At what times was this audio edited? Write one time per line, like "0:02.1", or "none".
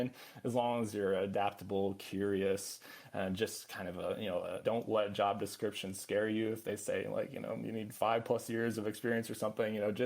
0:04.6